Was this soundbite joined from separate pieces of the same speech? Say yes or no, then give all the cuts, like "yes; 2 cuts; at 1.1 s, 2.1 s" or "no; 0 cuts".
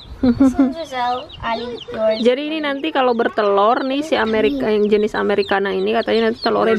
no; 0 cuts